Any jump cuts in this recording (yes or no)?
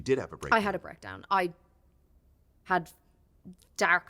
yes